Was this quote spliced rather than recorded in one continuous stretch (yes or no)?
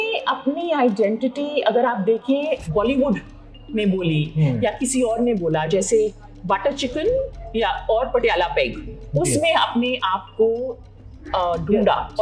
yes